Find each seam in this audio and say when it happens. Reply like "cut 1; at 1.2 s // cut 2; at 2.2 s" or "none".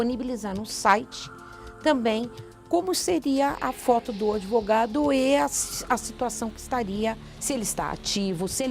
cut 1; at 7.3 s